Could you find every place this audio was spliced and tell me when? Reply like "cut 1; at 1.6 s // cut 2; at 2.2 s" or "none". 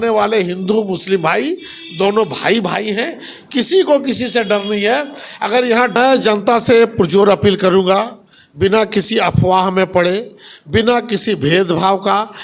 cut 1; at 6.0 s